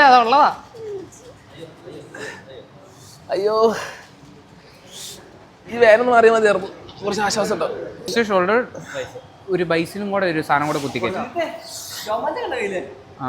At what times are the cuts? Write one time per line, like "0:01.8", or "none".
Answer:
0:08.1